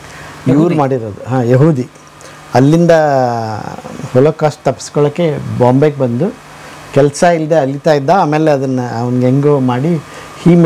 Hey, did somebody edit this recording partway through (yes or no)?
no